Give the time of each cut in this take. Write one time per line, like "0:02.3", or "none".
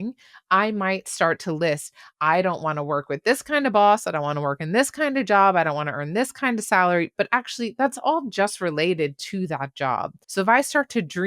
0:10.2